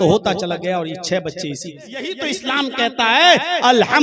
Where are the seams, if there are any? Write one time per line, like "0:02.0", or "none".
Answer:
0:02.2